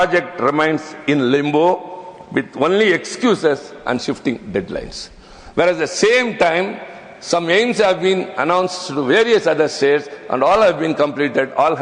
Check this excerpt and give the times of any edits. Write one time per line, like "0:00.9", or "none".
none